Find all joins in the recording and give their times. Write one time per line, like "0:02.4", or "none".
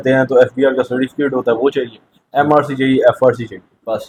none